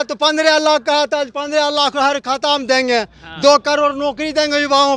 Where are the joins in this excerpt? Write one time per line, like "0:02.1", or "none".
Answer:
none